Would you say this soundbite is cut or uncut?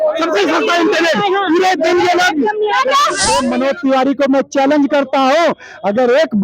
cut